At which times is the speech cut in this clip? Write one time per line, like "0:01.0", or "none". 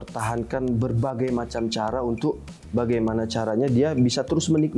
none

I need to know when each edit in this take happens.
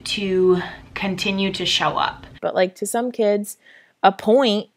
0:02.3

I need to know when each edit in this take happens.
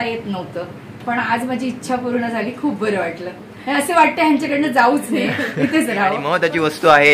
0:06.2

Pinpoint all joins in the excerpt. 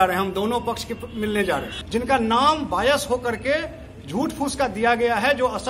0:01.8

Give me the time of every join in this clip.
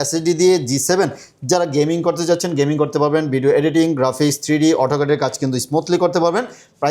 none

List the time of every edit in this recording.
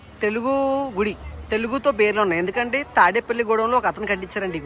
none

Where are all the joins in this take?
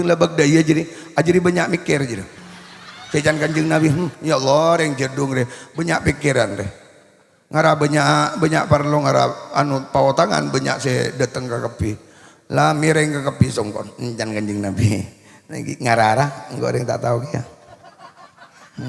none

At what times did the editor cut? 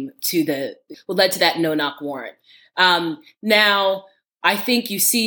0:00.9

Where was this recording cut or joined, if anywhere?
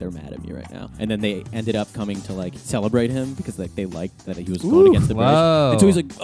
0:00.9
0:02.6
0:04.2

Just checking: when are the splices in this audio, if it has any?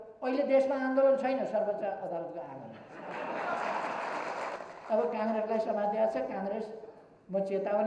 0:04.5

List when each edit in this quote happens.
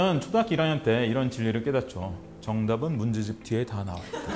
none

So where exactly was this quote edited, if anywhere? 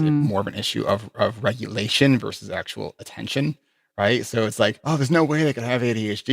0:04.8

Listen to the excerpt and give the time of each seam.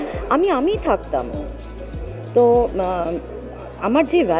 none

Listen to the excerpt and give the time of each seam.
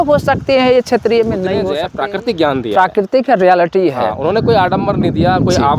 0:01.8

